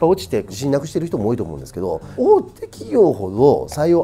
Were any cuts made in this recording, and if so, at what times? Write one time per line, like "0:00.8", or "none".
none